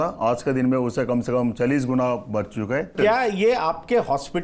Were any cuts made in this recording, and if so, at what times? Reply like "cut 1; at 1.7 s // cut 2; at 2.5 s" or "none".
cut 1; at 2.9 s